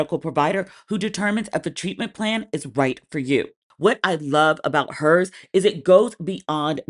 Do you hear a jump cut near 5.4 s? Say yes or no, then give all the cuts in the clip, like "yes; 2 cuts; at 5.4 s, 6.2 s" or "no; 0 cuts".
no; 1 cut; at 3.6 s